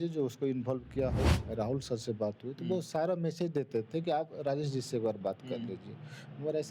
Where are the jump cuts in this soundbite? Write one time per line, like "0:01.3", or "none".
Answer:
0:01.4

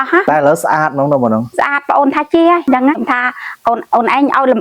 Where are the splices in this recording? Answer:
0:03.0

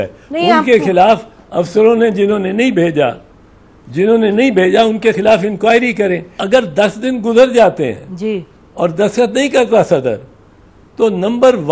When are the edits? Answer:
0:06.3

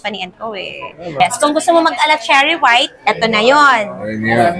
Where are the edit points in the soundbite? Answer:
0:01.2

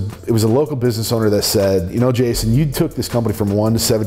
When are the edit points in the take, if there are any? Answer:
none

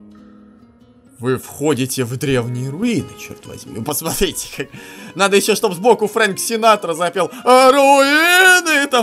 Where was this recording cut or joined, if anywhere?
none

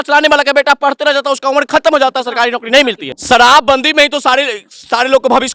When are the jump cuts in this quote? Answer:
0:03.1

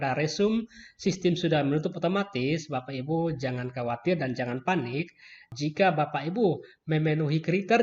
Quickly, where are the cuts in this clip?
0:05.5

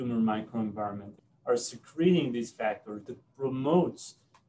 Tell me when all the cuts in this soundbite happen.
0:03.1

